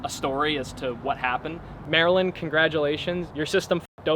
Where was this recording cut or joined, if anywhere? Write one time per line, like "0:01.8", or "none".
0:01.6

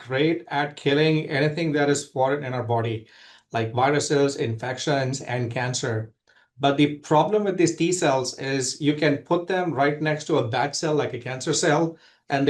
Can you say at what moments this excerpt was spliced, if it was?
none

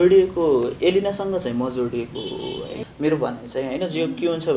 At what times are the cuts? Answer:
0:02.8

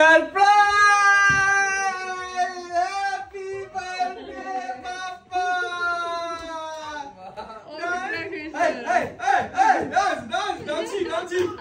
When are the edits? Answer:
none

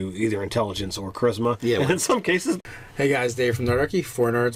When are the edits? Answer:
none

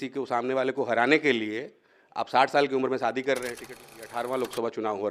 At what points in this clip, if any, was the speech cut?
0:03.8

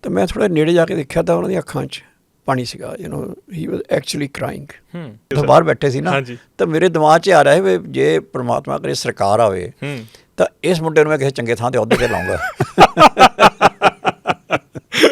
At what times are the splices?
0:05.3

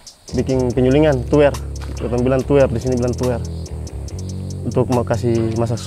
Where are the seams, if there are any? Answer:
none

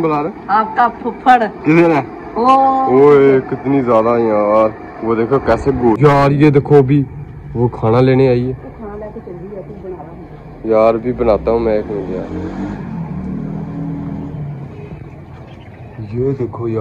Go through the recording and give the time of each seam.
0:06.0

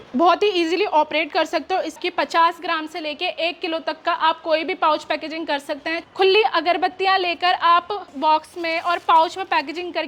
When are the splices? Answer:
0:02.0
0:06.0
0:08.1

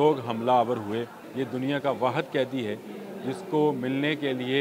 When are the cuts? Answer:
0:01.2

